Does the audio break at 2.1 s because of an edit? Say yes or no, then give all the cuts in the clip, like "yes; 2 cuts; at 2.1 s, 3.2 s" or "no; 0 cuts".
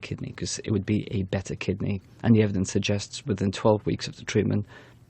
yes; 1 cut; at 2.1 s